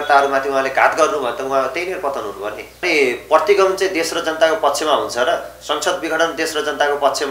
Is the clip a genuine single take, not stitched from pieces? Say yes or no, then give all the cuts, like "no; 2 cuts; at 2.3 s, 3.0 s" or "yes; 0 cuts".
no; 1 cut; at 2.8 s